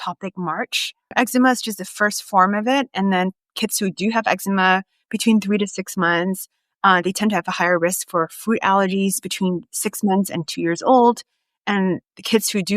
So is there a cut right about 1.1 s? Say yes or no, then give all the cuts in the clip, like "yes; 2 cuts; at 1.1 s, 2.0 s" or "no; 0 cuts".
yes; 1 cut; at 1.1 s